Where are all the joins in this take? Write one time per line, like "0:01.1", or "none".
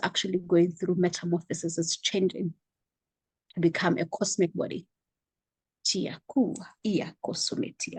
none